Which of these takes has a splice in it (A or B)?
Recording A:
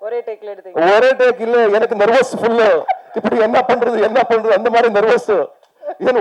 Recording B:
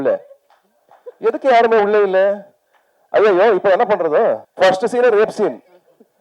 B